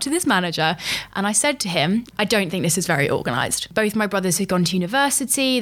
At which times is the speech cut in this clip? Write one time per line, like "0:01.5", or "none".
0:02.1
0:03.6